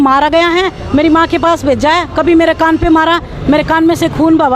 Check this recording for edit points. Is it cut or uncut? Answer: uncut